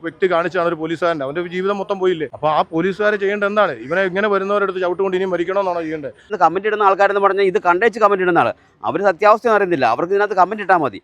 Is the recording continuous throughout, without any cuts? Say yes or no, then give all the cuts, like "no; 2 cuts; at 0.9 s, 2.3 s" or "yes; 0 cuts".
no; 2 cuts; at 2.3 s, 6.2 s